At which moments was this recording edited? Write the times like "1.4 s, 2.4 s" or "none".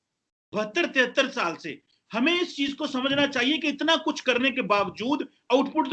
none